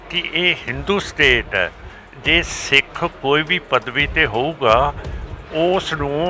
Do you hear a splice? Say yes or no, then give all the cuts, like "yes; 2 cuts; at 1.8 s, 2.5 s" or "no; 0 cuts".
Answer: no; 0 cuts